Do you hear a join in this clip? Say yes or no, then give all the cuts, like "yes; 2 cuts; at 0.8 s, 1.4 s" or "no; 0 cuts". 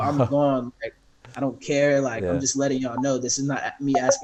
no; 0 cuts